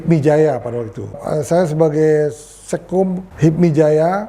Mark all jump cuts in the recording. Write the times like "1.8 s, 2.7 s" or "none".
1.2 s, 3.3 s